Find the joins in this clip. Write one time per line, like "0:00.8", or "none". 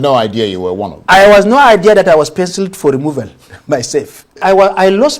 0:04.1